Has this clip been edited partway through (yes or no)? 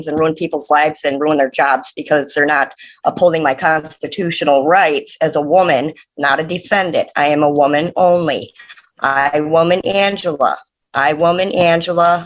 no